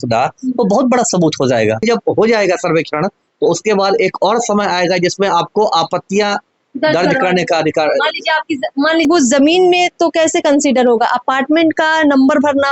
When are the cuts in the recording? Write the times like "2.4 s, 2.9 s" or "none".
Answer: 1.9 s, 9.1 s